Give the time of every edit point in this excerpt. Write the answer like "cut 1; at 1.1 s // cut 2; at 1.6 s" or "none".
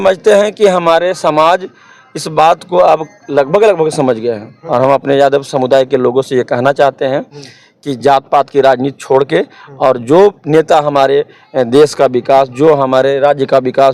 cut 1; at 4.5 s